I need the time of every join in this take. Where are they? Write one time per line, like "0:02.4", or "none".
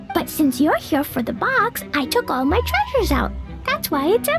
none